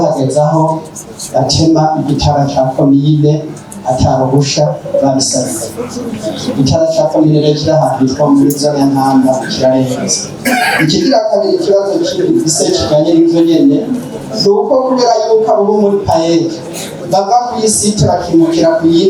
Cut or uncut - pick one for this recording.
uncut